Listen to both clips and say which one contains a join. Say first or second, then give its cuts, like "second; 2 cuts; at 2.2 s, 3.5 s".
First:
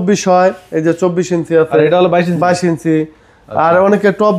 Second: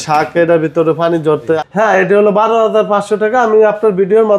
second; 1 cut; at 1.6 s